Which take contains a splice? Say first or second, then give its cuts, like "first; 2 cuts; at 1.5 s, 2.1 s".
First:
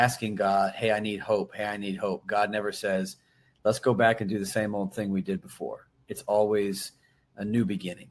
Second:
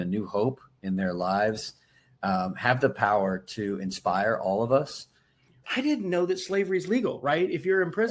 second; 1 cut; at 5.5 s